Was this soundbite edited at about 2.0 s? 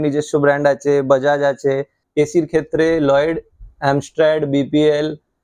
yes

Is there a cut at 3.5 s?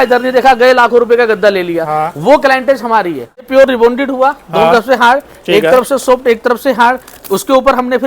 yes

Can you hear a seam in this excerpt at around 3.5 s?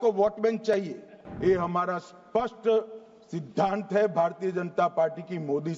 no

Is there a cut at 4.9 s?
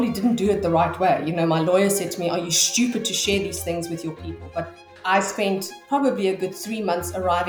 yes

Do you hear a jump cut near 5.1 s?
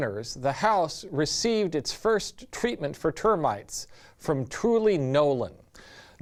no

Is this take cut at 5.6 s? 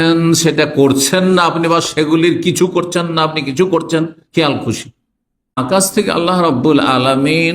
yes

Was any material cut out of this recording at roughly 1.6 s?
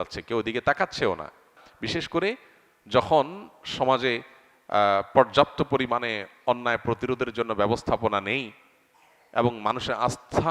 yes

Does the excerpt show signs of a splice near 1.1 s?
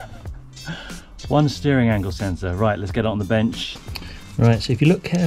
no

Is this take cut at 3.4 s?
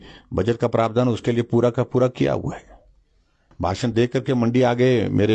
yes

